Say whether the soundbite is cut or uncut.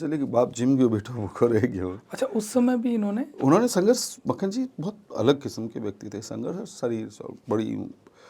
uncut